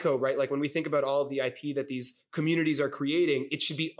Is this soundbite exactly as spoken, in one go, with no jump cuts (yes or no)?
yes